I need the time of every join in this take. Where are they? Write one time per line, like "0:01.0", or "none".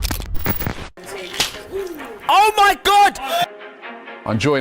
0:00.9